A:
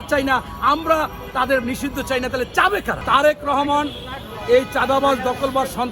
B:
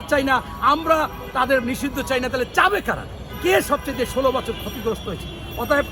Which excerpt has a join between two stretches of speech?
A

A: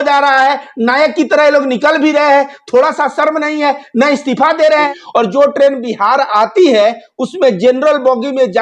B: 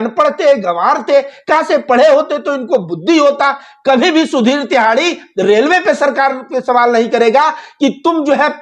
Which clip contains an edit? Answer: A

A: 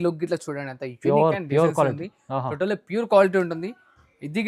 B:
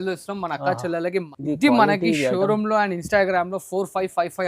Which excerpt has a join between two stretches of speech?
B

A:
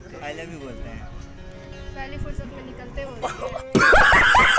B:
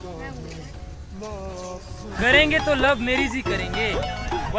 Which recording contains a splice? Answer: B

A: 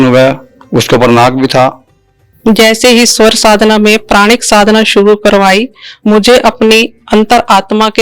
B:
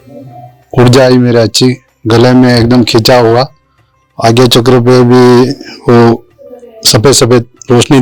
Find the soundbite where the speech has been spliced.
A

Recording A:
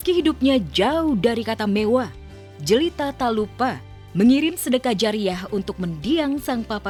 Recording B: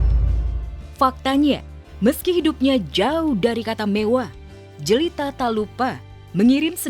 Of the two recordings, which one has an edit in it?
B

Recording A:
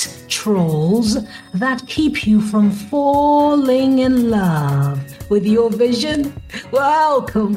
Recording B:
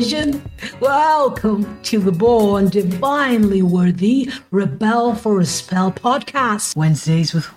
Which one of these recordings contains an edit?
B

